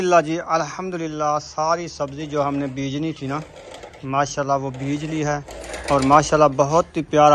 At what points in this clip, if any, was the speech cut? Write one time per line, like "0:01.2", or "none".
none